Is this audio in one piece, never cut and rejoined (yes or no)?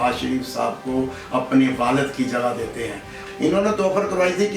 no